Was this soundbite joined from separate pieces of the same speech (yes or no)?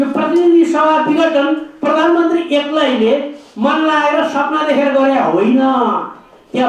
no